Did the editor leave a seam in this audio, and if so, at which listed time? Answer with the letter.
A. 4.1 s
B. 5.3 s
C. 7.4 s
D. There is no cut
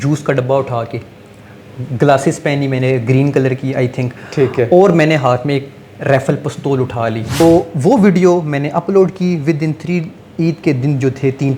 C